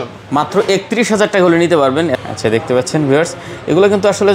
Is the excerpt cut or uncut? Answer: cut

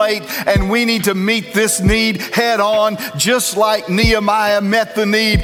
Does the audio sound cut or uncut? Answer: uncut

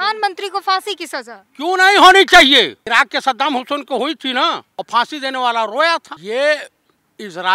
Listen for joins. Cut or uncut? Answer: cut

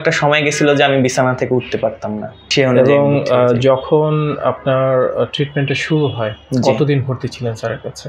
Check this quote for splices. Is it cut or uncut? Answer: cut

